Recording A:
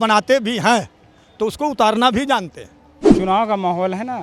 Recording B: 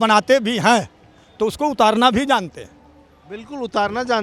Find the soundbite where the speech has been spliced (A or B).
A